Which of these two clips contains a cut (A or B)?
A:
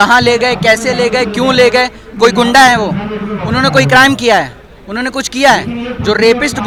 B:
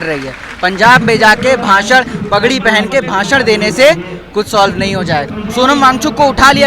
B